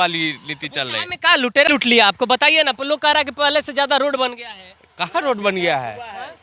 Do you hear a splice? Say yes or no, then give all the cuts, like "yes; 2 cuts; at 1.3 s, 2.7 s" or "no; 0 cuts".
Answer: no; 0 cuts